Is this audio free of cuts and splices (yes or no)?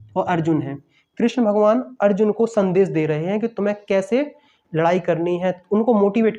yes